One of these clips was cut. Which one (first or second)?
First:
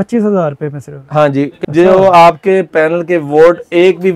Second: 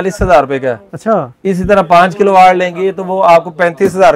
first